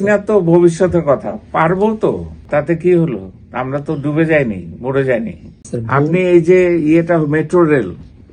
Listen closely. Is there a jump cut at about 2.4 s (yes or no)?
yes